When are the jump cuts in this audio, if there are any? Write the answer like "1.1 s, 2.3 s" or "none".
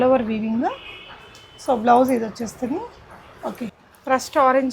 3.7 s